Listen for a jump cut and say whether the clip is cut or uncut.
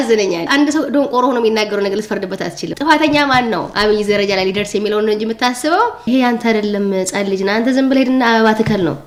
uncut